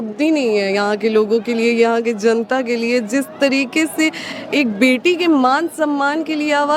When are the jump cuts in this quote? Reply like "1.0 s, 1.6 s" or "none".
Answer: none